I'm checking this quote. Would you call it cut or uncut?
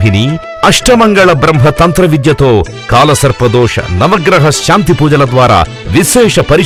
uncut